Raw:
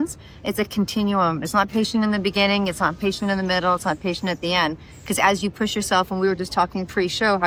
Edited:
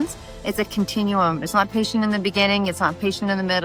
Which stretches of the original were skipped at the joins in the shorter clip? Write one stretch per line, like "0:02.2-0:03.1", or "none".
none